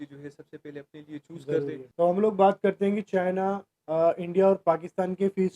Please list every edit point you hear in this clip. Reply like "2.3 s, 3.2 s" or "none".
1.8 s